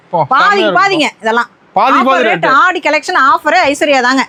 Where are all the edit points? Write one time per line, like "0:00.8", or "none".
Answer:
none